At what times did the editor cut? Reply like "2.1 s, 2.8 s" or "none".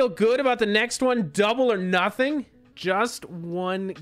2.6 s